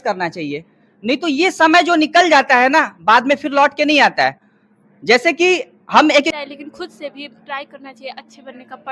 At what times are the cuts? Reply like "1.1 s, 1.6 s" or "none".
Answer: 6.3 s